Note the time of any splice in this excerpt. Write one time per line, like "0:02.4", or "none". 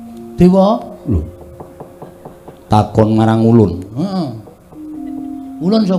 none